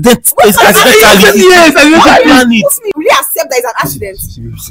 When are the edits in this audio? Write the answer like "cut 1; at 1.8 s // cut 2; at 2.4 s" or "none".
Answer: cut 1; at 2.9 s